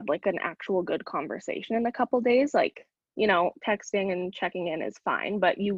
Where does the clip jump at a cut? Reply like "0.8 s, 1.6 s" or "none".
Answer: none